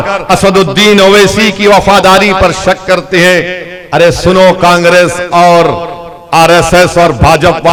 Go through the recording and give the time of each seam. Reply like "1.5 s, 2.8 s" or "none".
none